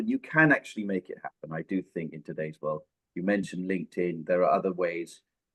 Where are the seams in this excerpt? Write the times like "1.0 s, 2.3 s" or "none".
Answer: none

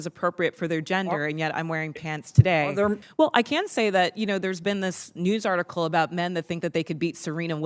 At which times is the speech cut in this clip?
3.0 s

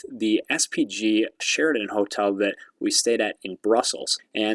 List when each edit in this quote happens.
1.4 s

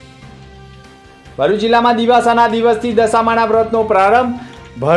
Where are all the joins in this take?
none

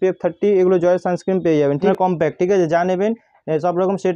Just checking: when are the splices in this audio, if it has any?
1.9 s

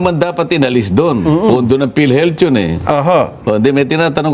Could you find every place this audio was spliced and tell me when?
none

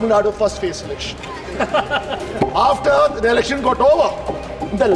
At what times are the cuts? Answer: none

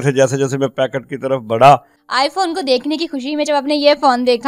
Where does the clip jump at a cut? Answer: 2.0 s

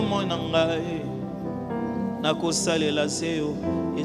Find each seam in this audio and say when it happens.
none

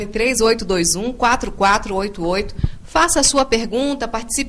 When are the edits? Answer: 3.0 s

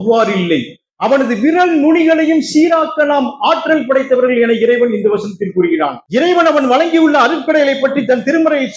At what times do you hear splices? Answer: 6.0 s

